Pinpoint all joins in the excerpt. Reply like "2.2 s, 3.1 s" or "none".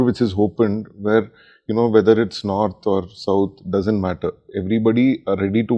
none